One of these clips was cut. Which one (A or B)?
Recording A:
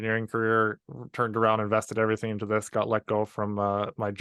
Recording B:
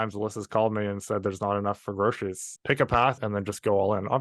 B